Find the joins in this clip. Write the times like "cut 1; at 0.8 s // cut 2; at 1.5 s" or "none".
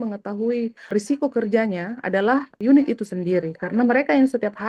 cut 1; at 0.9 s // cut 2; at 2.5 s